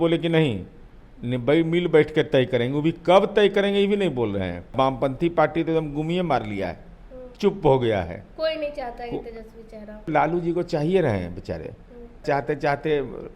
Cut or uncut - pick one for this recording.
cut